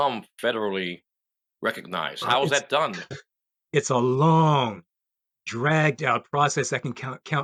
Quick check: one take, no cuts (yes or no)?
yes